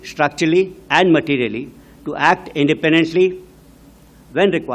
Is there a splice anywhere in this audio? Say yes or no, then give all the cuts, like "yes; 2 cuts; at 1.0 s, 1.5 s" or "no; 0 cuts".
no; 0 cuts